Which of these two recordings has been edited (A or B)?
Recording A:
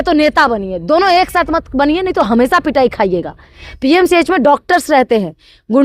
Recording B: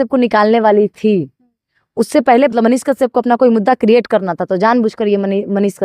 B